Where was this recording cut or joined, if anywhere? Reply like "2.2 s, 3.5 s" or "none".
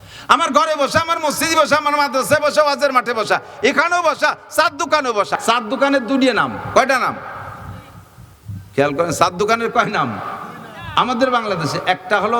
5.4 s